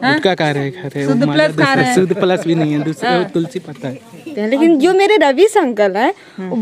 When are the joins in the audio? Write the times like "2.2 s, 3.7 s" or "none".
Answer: 4.3 s